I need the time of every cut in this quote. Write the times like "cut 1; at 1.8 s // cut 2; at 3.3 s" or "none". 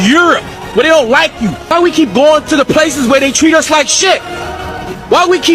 cut 1; at 1.7 s

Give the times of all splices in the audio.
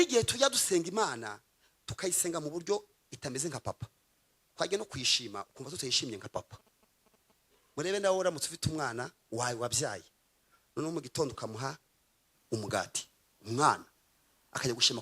none

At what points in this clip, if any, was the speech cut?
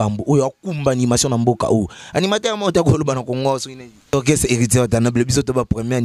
cut 1; at 4.1 s

